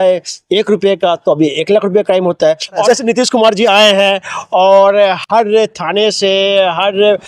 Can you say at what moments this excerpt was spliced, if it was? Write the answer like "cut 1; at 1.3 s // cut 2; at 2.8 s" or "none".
cut 1; at 2.8 s